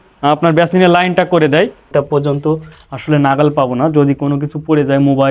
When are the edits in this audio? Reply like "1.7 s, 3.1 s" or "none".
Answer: 1.9 s

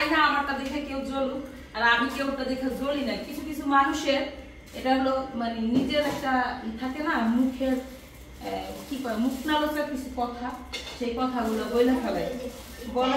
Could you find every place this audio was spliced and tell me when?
none

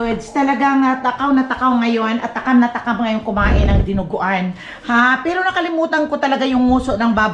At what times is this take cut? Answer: none

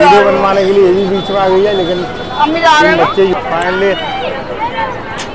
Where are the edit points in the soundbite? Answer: 3.3 s

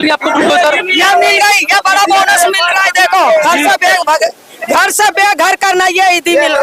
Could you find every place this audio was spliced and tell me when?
none

